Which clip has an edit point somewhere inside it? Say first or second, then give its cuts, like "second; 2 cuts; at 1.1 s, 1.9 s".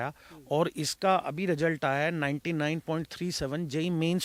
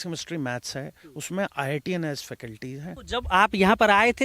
second; 1 cut; at 2.9 s